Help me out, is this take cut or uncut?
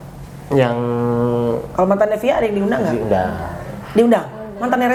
uncut